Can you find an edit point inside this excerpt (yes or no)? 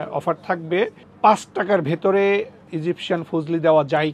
yes